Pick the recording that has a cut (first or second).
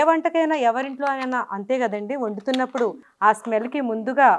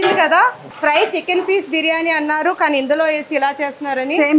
first